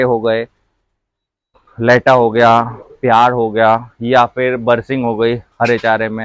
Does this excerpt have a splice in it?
no; 0 cuts

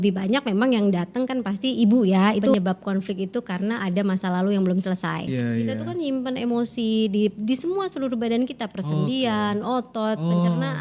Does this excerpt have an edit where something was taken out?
yes; 2 cuts; at 2.5 s, 5.3 s

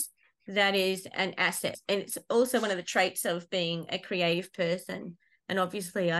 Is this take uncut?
no; 1 cut; at 1.8 s

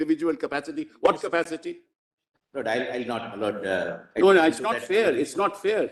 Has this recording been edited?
no; 0 cuts

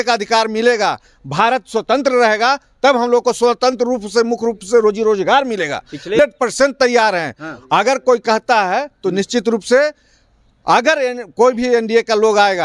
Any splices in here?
yes; 1 cut; at 6.2 s

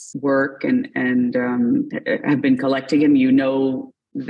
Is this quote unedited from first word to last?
yes; 0 cuts

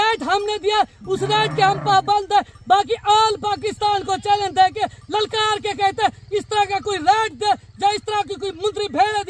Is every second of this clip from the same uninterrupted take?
yes; 0 cuts

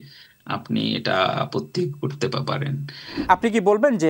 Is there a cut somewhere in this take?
yes; 1 cut; at 3.2 s

